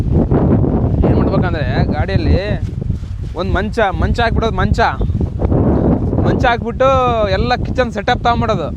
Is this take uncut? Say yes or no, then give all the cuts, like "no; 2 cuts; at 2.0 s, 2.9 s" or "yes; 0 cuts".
yes; 0 cuts